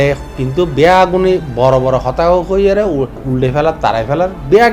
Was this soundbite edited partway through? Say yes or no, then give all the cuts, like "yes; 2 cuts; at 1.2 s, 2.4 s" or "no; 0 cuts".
yes; 1 cut; at 3.2 s